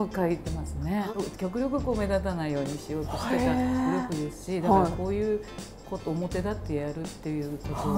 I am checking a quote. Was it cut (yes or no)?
yes